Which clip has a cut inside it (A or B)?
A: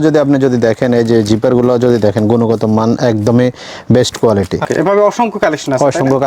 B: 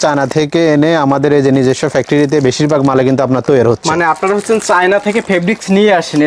A